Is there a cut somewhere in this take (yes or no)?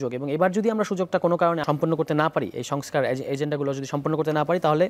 yes